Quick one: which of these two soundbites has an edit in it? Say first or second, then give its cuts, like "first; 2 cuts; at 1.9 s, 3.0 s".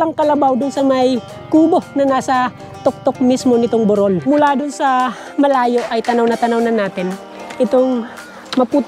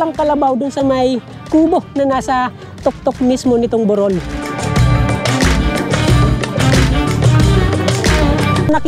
first; 1 cut; at 4.2 s